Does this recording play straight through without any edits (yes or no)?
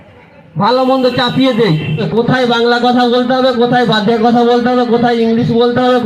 no